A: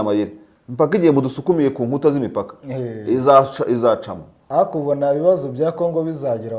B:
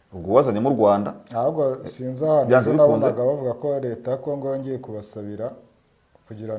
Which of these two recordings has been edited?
A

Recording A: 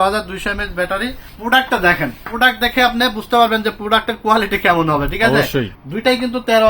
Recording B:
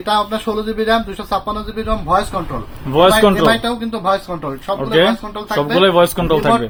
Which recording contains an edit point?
A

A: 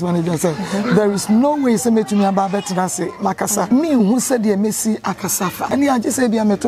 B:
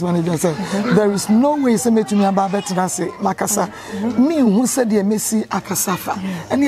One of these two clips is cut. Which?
A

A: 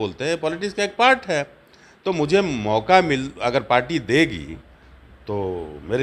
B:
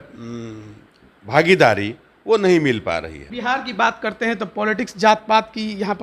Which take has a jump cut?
B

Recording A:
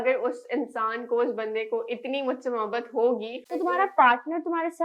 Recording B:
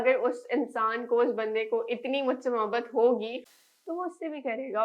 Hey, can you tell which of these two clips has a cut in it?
A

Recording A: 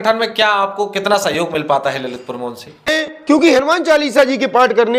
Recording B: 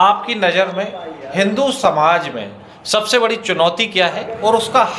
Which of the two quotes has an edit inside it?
A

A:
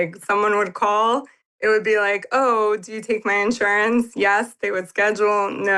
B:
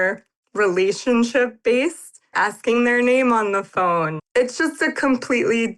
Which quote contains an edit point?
B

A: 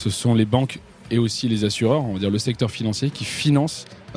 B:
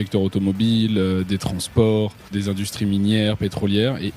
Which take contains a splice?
B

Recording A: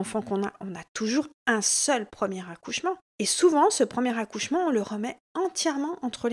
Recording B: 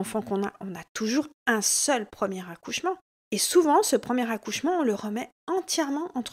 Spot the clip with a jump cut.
A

